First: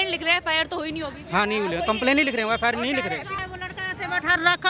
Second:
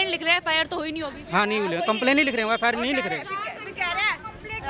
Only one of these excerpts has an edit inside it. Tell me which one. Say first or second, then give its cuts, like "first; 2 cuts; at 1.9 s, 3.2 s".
first; 1 cut; at 3.4 s